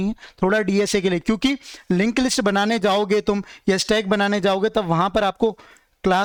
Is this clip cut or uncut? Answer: uncut